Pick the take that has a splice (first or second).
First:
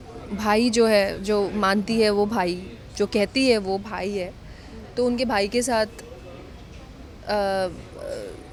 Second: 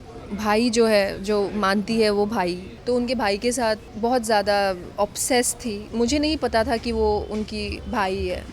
second